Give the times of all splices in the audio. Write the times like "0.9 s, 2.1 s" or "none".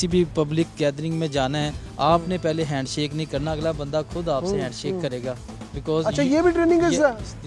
none